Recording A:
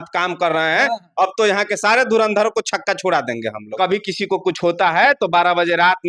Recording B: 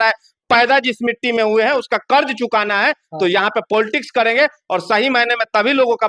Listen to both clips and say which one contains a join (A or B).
A